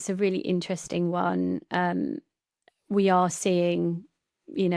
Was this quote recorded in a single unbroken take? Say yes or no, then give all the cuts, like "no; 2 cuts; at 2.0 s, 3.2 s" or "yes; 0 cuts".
yes; 0 cuts